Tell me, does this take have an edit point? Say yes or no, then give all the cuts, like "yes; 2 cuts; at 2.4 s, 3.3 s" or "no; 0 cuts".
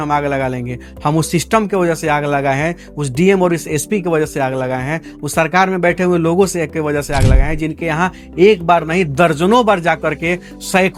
no; 0 cuts